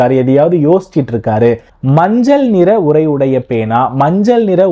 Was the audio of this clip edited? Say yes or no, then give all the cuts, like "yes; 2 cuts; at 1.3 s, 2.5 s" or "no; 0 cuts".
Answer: yes; 1 cut; at 1.7 s